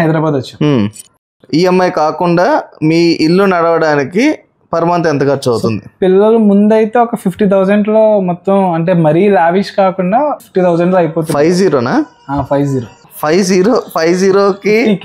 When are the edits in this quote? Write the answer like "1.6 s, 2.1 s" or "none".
1.2 s, 10.4 s